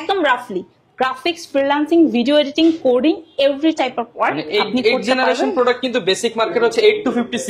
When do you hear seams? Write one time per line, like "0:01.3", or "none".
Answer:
none